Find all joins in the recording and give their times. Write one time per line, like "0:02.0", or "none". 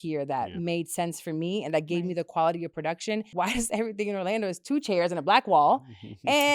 0:03.3